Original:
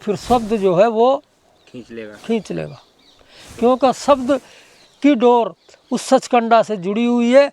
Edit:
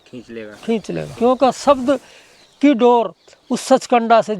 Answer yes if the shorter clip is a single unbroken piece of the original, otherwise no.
no